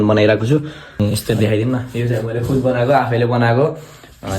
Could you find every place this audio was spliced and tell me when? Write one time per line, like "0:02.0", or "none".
0:01.0